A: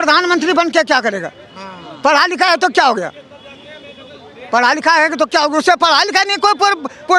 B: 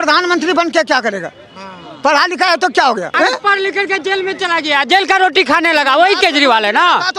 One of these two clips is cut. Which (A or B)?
B